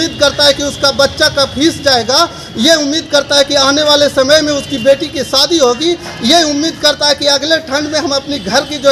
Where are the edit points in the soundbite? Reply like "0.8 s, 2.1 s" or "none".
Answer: none